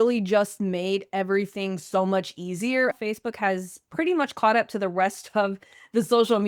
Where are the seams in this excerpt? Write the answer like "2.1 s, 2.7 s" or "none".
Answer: 2.9 s